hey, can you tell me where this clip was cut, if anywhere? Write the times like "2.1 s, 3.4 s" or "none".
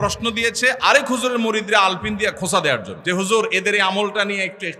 2.9 s